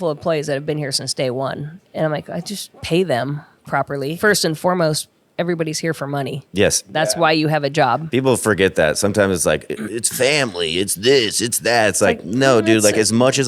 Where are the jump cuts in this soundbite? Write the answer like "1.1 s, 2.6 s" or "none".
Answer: 1.8 s, 2.7 s, 4.2 s, 6.9 s